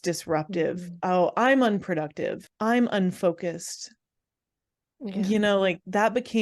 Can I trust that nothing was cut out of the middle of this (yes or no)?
no